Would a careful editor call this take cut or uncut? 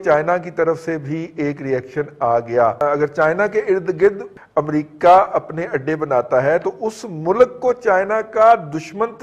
cut